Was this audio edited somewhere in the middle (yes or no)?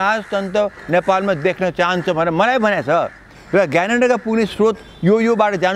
no